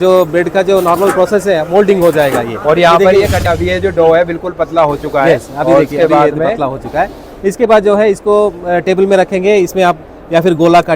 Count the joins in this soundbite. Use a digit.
1